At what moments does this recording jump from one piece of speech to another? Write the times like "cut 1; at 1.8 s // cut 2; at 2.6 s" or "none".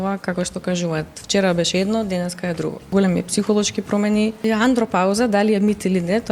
cut 1; at 2.8 s // cut 2; at 4.4 s